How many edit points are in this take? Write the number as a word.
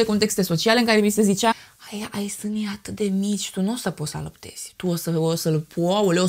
one